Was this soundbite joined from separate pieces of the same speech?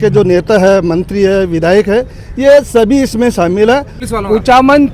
yes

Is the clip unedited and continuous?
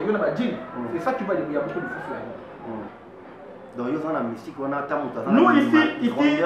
no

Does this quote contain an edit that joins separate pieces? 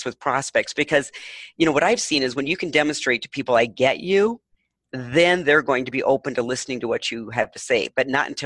no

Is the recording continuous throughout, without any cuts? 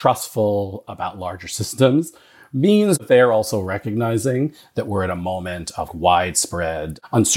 no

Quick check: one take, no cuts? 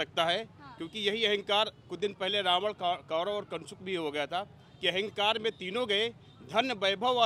yes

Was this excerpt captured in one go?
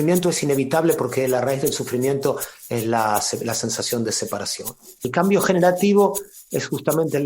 no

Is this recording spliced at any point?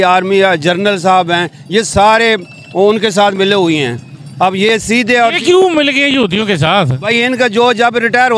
no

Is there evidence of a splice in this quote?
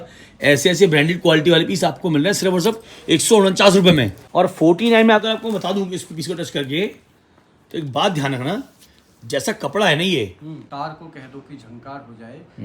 yes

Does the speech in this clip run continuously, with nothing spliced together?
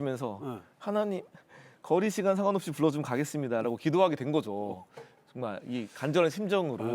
yes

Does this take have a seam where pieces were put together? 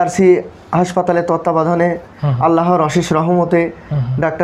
no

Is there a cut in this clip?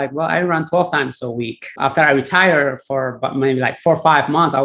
yes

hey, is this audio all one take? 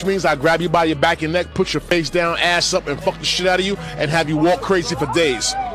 yes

